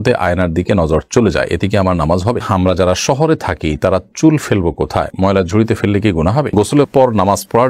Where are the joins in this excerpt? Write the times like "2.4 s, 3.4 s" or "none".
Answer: 2.4 s, 6.5 s